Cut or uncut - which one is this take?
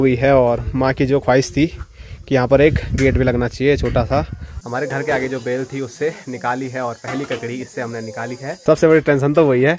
cut